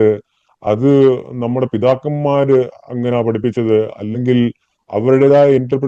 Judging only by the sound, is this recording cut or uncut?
uncut